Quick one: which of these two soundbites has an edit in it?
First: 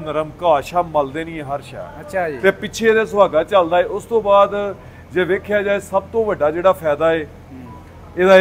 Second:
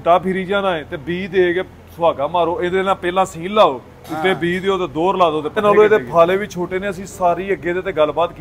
second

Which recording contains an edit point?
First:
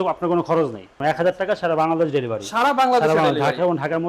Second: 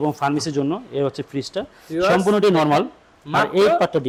first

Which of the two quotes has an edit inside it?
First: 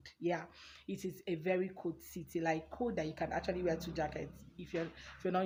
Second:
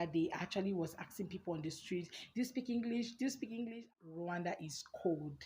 second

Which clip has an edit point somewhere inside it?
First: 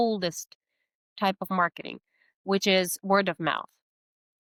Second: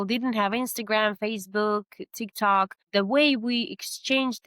second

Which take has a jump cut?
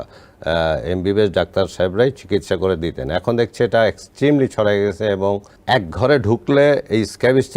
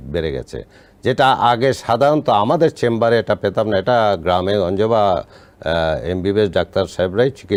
first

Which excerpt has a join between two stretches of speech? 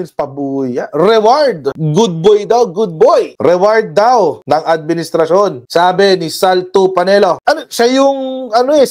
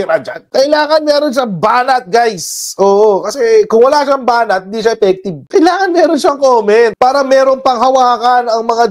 first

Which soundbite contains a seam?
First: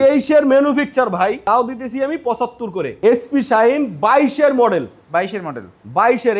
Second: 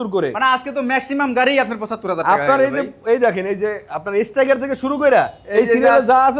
first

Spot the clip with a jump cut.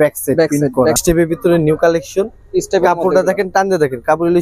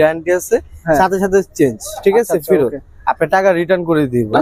first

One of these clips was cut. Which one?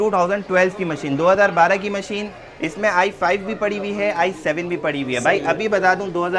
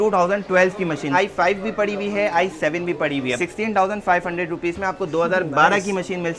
second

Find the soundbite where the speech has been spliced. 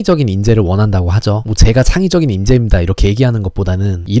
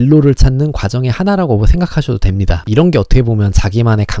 second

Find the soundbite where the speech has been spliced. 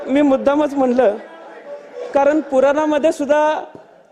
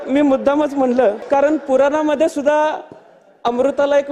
second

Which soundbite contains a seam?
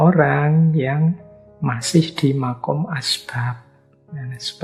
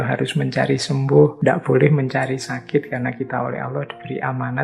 second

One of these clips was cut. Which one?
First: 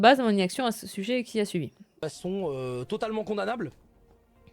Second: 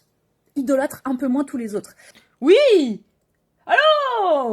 first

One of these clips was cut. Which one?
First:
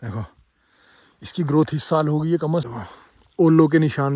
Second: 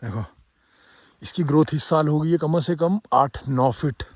first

